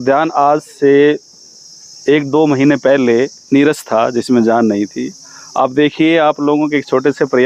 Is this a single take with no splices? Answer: yes; 0 cuts

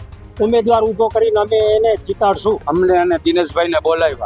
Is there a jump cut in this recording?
yes; 1 cut; at 2.6 s

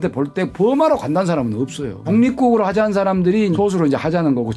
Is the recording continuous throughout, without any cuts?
no; 2 cuts; at 2.0 s, 3.5 s

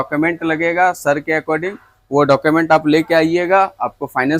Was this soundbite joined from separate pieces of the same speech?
no; 0 cuts

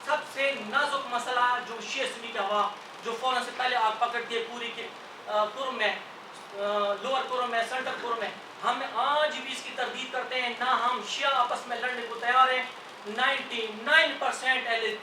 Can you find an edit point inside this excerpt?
no; 0 cuts

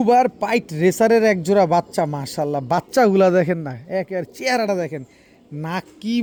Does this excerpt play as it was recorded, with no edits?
yes; 0 cuts

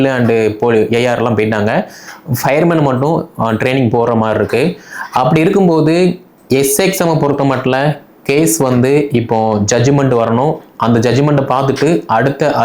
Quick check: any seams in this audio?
no; 0 cuts

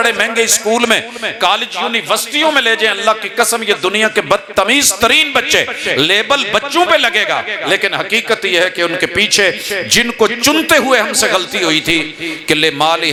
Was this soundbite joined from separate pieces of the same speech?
no; 0 cuts

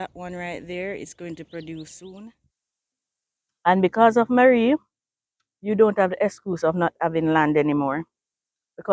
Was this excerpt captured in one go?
no; 1 cut; at 2.4 s

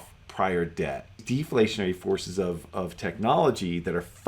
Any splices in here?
yes; 1 cut; at 1.2 s

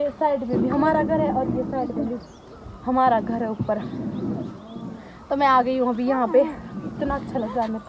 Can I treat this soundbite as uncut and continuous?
yes; 0 cuts

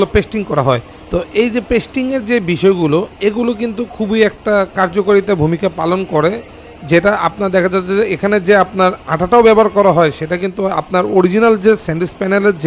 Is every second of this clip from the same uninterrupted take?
yes; 0 cuts

